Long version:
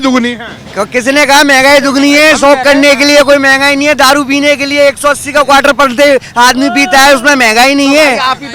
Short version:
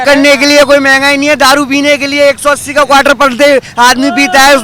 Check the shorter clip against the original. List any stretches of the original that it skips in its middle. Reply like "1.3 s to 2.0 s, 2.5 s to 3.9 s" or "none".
none